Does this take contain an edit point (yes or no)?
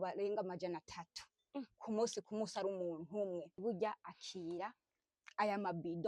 yes